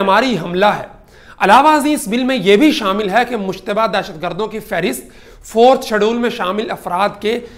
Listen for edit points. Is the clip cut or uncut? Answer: uncut